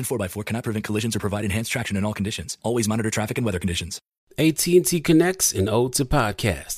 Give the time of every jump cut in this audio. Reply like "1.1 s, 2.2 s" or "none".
4.1 s